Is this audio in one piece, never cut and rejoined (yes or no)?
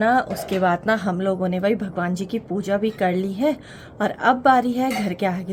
yes